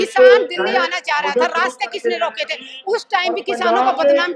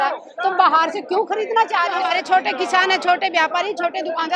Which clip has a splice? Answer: second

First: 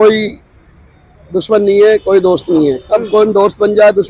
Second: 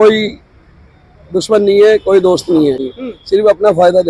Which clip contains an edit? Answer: second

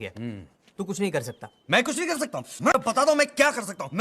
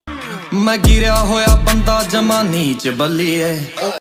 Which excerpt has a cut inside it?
first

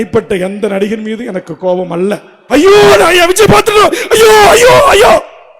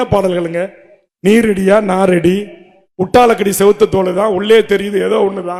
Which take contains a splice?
first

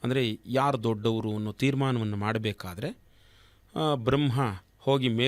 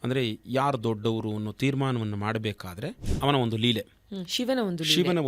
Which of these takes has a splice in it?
second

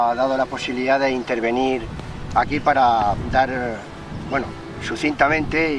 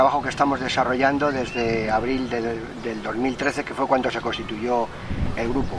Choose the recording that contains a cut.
first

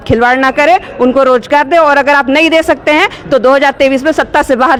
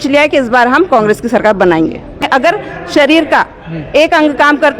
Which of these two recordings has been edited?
second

